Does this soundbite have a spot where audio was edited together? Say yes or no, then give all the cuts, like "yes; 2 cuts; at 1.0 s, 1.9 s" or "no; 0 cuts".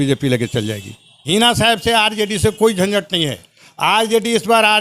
yes; 1 cut; at 1.1 s